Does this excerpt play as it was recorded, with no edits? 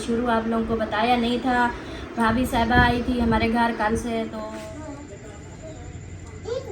no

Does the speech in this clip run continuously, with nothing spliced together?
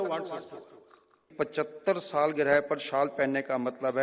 no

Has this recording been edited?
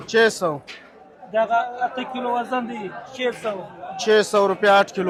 no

